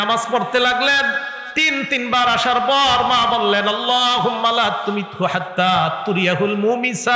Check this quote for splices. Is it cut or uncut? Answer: uncut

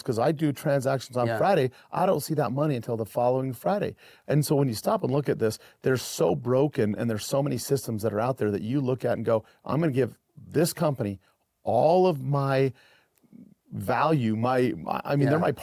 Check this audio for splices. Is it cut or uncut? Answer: uncut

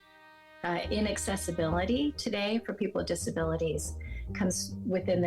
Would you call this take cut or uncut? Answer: uncut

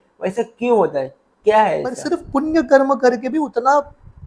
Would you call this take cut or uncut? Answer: cut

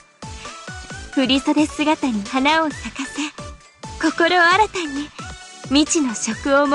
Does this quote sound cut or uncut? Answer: uncut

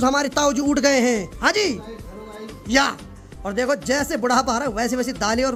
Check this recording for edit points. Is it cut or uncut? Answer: uncut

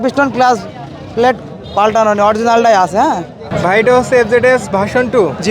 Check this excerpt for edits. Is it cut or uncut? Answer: cut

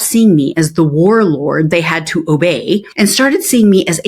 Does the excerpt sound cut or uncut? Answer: cut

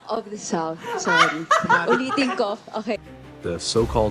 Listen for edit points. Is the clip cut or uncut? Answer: cut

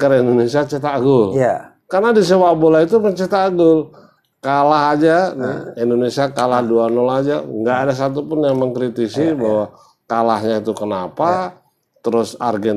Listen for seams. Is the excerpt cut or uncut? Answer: uncut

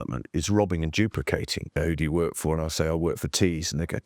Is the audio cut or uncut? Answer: cut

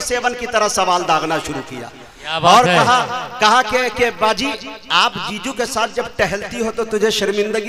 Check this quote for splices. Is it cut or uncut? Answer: uncut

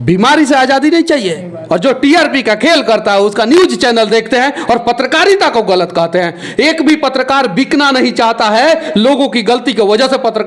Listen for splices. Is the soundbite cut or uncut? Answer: cut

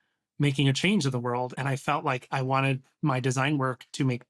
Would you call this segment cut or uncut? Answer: cut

